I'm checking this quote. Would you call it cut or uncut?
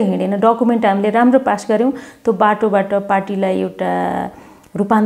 uncut